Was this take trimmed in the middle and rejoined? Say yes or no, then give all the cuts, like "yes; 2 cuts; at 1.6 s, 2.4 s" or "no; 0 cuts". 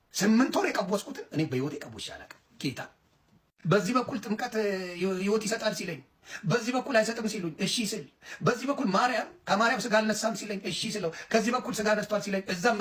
no; 0 cuts